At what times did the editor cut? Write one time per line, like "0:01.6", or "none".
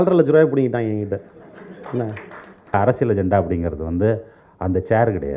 0:02.7